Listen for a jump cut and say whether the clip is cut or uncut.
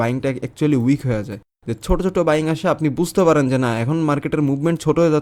uncut